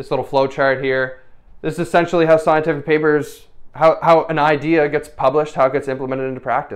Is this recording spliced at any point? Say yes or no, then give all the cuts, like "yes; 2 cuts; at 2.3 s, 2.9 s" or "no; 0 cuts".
no; 0 cuts